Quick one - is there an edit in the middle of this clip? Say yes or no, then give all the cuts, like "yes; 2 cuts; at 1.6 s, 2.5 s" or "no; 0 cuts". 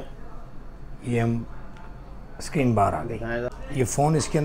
yes; 1 cut; at 3.5 s